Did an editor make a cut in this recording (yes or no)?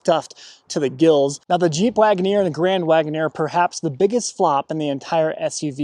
yes